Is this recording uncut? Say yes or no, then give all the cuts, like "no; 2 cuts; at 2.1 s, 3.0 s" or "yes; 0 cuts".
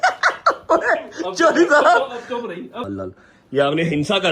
no; 1 cut; at 2.9 s